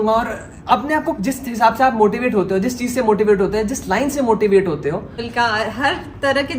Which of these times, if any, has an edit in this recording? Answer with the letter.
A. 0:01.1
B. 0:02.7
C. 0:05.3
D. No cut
C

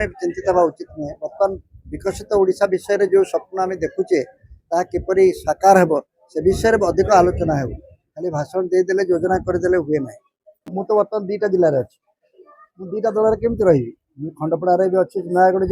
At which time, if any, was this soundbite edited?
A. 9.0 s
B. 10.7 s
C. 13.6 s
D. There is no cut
B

